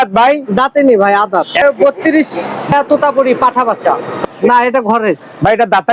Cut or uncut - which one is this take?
cut